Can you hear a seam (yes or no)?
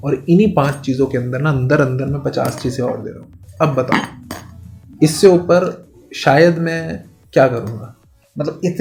no